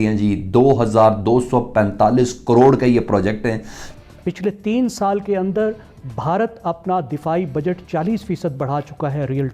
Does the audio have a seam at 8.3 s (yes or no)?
no